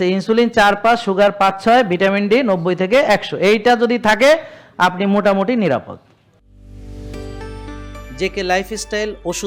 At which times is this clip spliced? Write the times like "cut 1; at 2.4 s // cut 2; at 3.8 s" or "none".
none